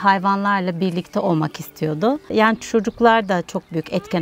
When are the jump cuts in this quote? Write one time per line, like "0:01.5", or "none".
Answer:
0:02.2